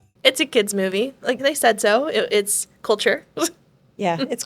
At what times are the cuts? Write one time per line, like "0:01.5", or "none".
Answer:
0:01.4